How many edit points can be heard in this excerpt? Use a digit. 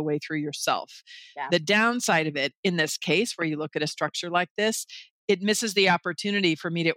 1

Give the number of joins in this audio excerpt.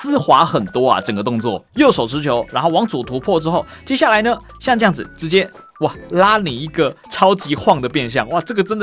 1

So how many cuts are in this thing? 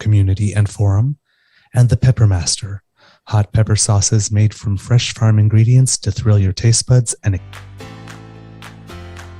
1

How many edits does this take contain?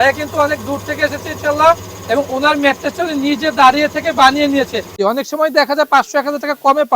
1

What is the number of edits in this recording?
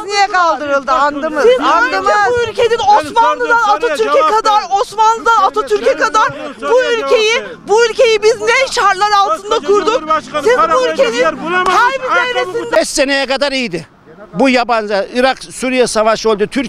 1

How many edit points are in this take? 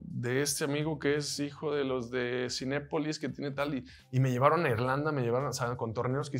1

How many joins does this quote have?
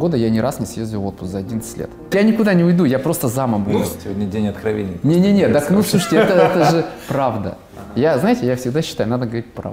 2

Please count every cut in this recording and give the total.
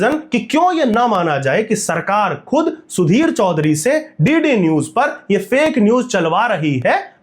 0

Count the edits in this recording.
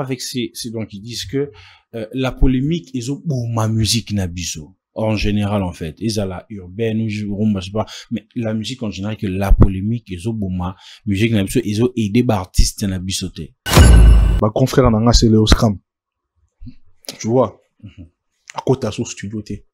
1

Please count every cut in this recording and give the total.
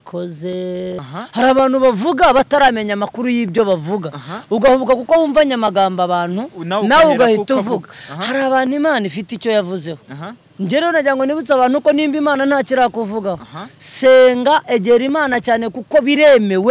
1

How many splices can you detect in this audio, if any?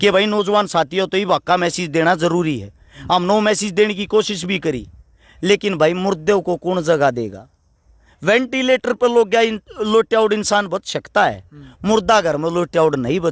0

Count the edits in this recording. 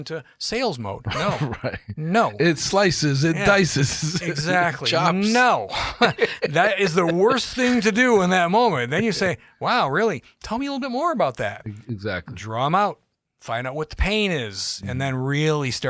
0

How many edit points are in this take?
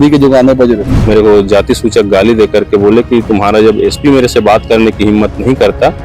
1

